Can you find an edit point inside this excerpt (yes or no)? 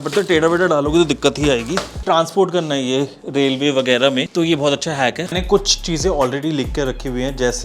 yes